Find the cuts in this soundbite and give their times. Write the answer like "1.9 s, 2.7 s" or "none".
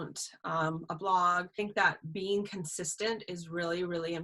1.5 s